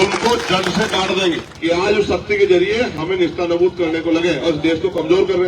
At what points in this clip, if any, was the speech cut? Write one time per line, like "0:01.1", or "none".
0:01.5